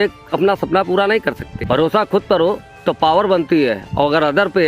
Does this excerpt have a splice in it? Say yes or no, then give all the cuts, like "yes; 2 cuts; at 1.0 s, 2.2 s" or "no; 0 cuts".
yes; 1 cut; at 1.5 s